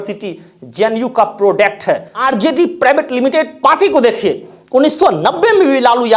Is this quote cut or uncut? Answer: cut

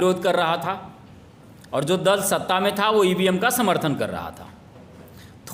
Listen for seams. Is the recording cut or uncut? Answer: uncut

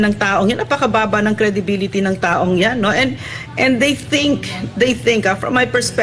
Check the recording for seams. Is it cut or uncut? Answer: uncut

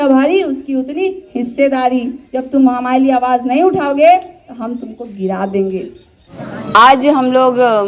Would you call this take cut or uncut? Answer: uncut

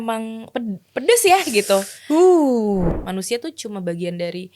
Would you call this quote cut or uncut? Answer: cut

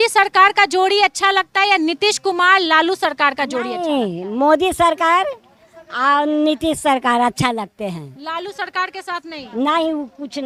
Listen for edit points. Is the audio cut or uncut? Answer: uncut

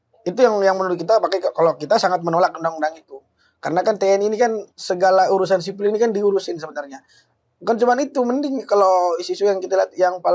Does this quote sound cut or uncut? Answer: uncut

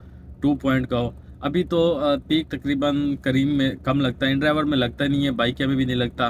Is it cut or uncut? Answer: uncut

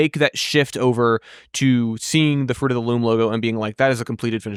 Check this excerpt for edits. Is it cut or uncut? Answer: uncut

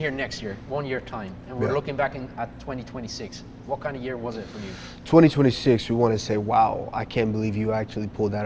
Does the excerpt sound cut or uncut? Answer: uncut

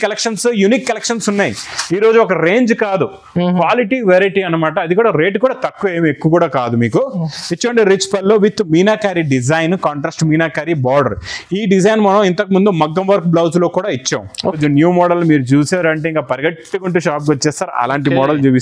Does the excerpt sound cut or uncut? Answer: cut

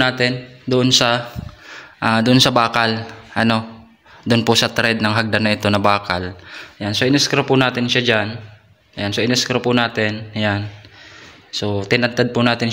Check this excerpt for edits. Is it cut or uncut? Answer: uncut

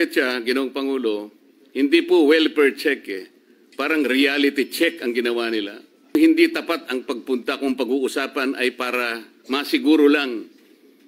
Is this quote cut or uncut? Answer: cut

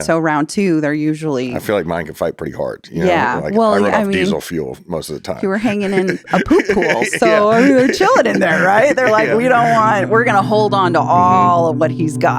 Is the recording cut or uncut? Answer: uncut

